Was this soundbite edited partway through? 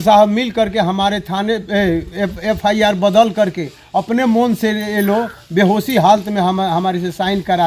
no; 0 cuts

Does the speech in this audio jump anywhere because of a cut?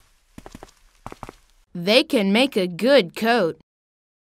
yes; 1 cut; at 1.5 s

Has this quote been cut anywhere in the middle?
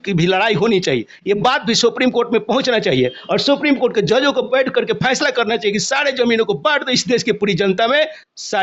no; 0 cuts

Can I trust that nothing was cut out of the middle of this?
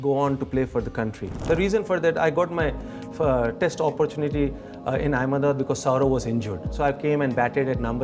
no; 1 cut; at 1.4 s

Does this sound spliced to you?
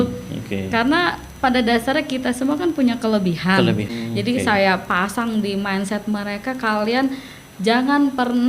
yes; 1 cut; at 3.9 s

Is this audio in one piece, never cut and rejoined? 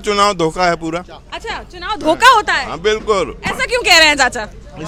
yes; 0 cuts

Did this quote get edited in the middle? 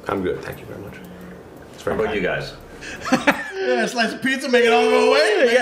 yes; 1 cut; at 3.5 s

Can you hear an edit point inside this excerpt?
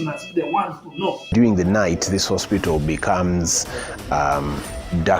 yes; 1 cut; at 1.3 s

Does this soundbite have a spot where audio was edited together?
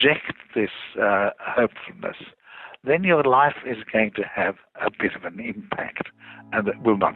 no; 0 cuts

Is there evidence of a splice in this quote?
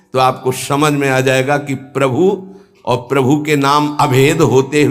no; 0 cuts

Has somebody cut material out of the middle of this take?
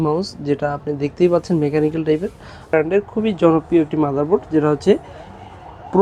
yes; 1 cut; at 2.7 s

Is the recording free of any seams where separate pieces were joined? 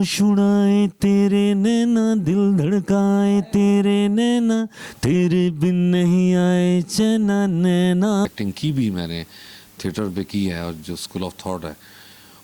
no; 1 cut; at 8.3 s

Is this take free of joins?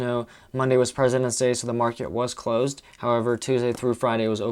yes; 0 cuts

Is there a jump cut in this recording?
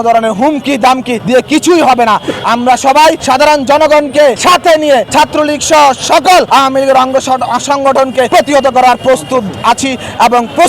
yes; 6 cuts; at 1.2 s, 3.2 s, 4.4 s, 5.1 s, 6.5 s, 8.3 s

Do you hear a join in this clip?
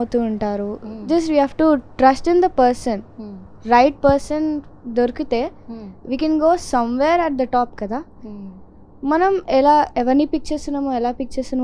no; 0 cuts

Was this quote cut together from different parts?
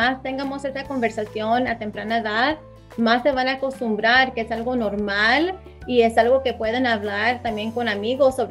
no; 0 cuts

